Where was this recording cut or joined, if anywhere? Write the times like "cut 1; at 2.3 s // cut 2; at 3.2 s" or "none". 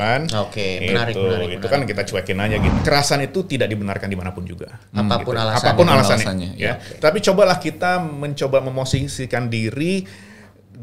cut 1; at 2.8 s